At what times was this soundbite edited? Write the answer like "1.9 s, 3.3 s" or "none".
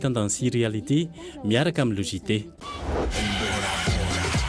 2.5 s

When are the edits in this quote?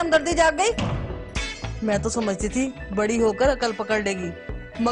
none

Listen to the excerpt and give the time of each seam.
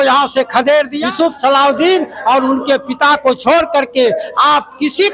1.0 s

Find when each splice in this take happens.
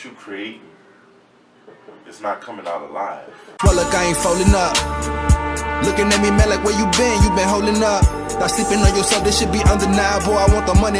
3.4 s

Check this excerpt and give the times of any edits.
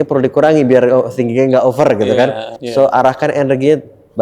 2.6 s

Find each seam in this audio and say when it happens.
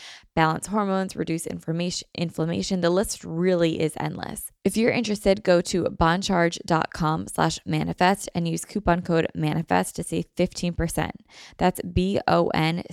4.4 s

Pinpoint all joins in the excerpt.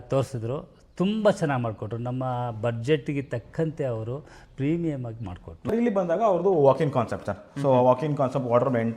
5.7 s

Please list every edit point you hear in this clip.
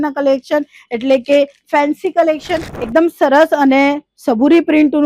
2.7 s

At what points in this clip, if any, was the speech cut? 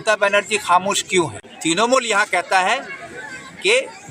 1.9 s

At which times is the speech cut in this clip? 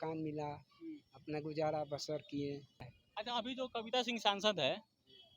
2.9 s

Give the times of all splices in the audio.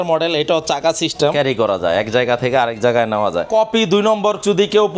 1.3 s, 3.5 s

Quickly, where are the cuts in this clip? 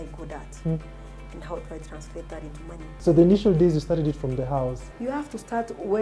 3.0 s, 4.9 s

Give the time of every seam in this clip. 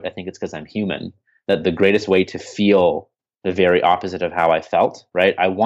none

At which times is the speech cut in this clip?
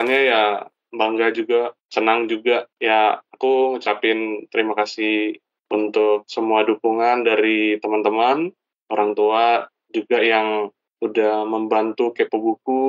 1.8 s, 2.7 s

